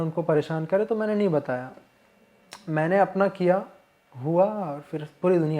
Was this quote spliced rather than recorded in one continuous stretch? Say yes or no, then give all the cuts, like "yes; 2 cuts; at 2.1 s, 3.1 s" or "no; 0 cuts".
no; 0 cuts